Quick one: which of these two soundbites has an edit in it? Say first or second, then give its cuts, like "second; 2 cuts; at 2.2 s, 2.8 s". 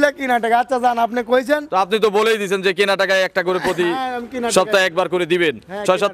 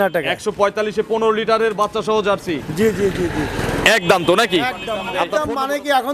second; 1 cut; at 5.1 s